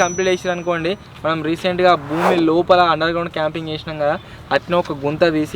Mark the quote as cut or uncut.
uncut